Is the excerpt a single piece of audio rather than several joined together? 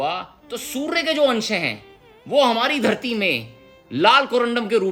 yes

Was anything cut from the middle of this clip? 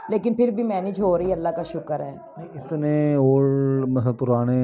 no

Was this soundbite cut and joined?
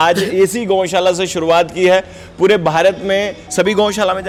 no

